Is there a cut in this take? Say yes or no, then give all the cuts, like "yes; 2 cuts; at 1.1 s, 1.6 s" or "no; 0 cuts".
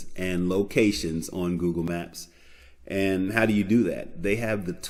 no; 0 cuts